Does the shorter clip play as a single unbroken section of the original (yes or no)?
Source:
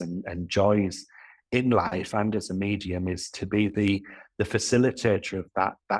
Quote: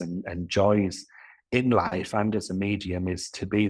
yes